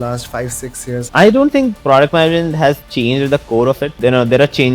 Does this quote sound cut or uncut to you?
cut